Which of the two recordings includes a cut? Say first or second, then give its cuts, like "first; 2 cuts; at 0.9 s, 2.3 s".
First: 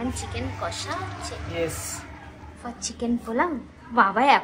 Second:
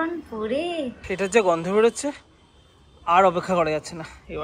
second; 1 cut; at 1.0 s